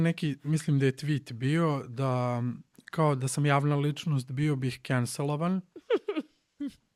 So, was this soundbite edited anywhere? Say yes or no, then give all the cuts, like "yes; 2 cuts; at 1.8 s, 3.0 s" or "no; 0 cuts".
no; 0 cuts